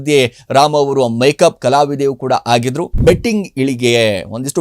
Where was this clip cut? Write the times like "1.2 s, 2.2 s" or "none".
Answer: 2.9 s